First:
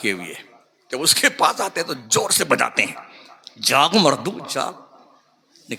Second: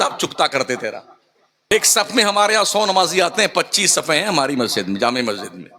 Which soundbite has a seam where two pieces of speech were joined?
second; 1 cut; at 1.7 s

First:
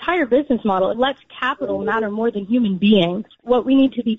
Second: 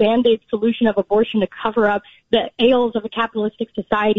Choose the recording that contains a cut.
first; 2 cuts; at 0.9 s, 3.4 s

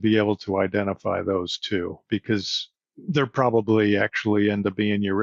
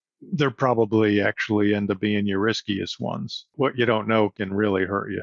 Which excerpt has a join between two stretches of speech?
second; 2 cuts; at 3.5 s, 4.4 s

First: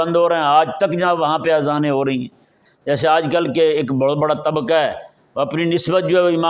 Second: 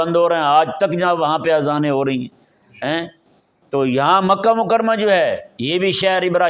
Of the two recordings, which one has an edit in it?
first; 1 cut; at 2.7 s

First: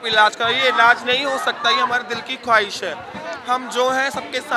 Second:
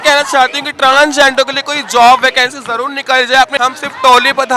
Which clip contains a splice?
second; 1 cut; at 3.5 s

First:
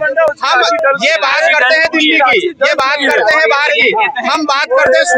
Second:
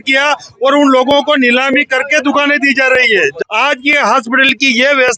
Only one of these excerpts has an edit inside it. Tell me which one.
second; 1 cut; at 3.3 s

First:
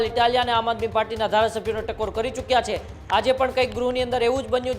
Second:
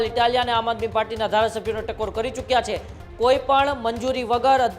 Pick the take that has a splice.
second; 1 cut; at 3.0 s

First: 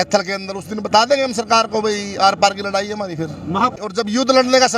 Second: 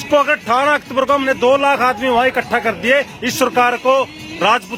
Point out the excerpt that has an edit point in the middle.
first; 1 cut; at 3.8 s

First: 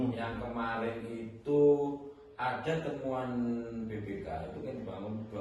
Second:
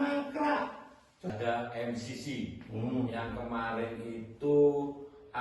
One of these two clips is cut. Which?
second; 1 cut; at 1.3 s

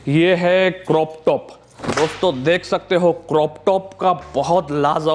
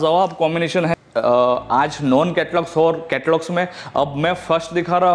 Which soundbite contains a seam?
second; 1 cut; at 1.0 s

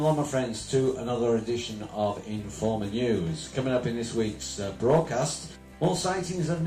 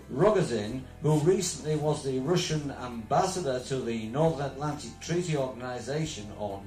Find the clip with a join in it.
first; 1 cut; at 1.7 s

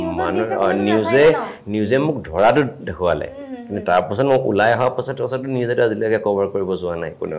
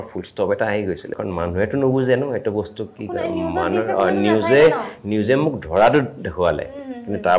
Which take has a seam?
second; 1 cut; at 1.2 s

